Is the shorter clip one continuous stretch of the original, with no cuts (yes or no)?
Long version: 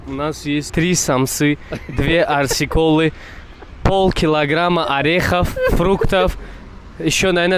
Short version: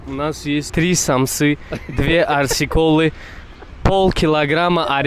yes